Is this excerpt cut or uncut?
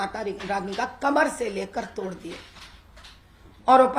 uncut